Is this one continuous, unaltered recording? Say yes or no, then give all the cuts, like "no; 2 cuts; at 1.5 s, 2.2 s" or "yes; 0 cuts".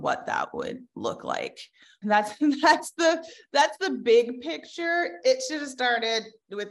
no; 1 cut; at 2.0 s